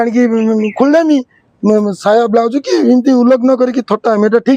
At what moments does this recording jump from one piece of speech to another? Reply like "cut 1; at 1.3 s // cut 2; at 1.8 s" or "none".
none